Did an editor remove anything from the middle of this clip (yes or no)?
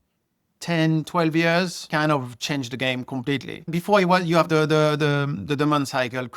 yes